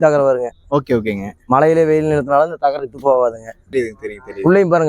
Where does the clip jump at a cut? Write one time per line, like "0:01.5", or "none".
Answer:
0:03.6